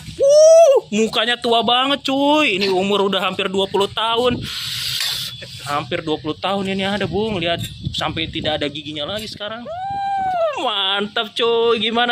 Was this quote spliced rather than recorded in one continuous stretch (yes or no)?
yes